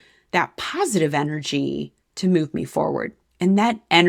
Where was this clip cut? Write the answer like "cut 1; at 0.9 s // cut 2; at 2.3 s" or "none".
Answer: none